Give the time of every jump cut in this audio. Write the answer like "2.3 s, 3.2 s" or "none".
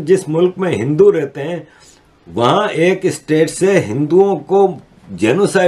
none

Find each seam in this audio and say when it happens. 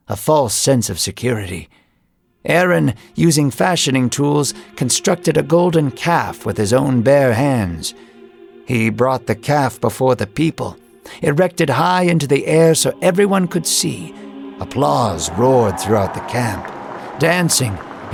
none

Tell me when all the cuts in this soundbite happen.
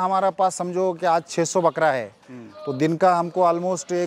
none

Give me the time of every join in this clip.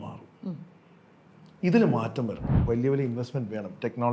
2.6 s

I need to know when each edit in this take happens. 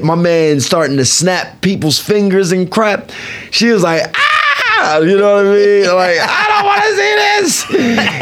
none

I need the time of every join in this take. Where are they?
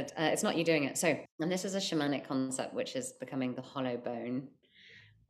1.3 s

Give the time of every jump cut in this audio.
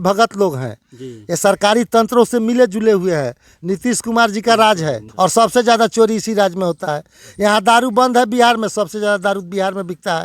5.0 s

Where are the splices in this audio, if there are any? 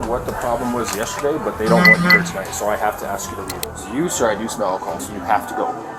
3.6 s, 5.0 s

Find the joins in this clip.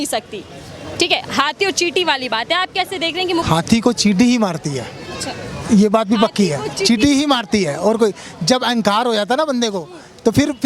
3.4 s

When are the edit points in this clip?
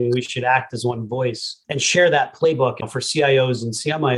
1.5 s, 2.8 s

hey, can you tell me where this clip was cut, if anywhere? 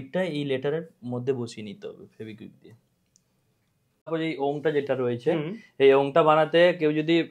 4.1 s

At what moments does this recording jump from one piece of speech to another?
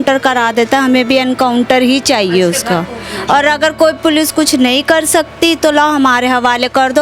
none

